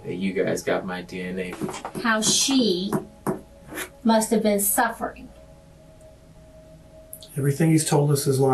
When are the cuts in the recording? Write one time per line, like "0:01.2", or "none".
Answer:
0:01.5